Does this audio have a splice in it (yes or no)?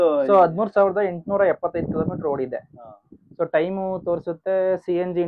no